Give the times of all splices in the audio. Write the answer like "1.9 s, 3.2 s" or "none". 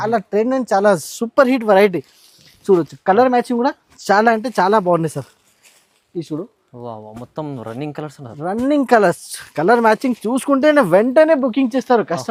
none